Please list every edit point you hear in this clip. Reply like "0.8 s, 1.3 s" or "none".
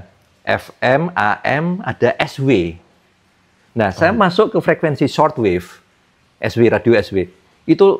none